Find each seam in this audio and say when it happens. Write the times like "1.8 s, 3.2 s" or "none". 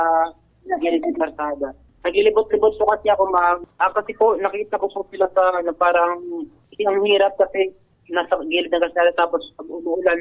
1.9 s, 3.6 s